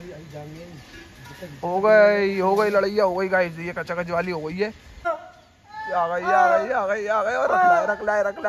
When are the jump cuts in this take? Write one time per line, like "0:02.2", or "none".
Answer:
0:05.1